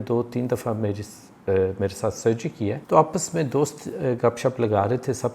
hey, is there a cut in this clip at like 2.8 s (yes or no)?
yes